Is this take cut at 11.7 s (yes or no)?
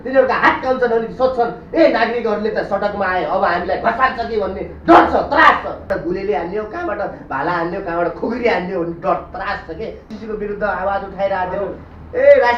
no